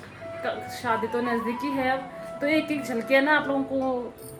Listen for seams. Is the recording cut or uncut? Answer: uncut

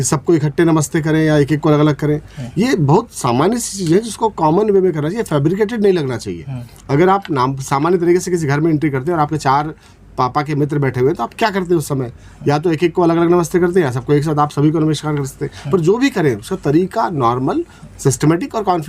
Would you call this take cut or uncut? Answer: uncut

